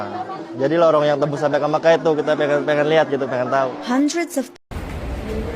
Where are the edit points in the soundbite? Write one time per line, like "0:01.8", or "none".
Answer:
0:04.5